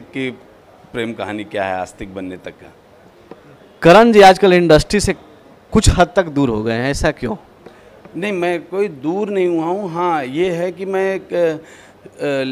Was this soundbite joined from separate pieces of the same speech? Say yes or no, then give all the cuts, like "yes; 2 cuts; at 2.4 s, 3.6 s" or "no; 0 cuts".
no; 0 cuts